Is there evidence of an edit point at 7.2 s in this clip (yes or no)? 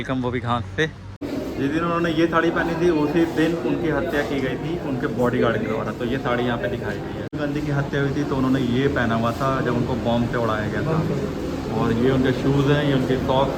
yes